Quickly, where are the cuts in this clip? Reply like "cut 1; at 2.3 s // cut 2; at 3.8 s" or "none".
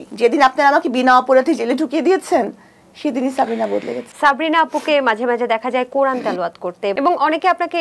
cut 1; at 4.1 s // cut 2; at 6.9 s